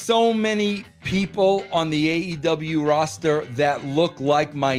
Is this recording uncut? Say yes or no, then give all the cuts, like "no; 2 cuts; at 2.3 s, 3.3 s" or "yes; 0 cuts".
yes; 0 cuts